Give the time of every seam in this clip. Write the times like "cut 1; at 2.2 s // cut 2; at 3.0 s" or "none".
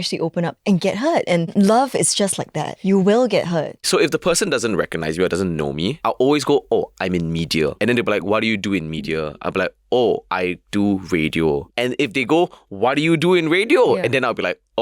cut 1; at 1.5 s // cut 2; at 2.7 s // cut 3; at 3.8 s // cut 4; at 6.0 s // cut 5; at 7.7 s // cut 6; at 10.3 s // cut 7; at 11.7 s